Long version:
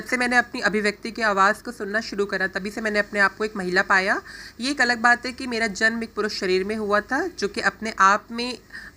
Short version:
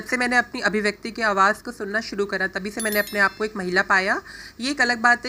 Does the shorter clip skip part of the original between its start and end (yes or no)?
no